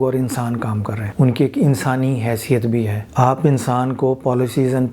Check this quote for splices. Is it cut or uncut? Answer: cut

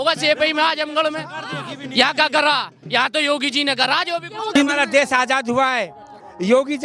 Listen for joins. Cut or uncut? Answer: cut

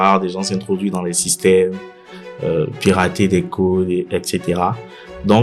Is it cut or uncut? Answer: uncut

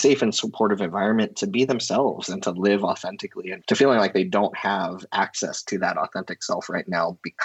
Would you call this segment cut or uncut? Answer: uncut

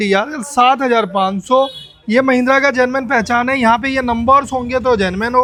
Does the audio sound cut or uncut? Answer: uncut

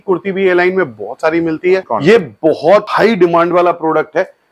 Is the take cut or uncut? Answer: cut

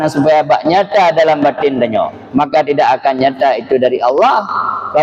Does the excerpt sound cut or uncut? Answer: uncut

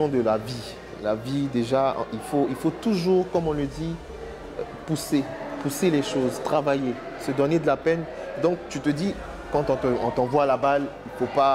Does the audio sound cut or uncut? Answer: uncut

